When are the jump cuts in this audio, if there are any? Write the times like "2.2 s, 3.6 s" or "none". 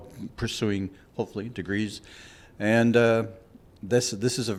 none